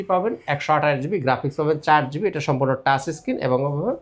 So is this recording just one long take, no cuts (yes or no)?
yes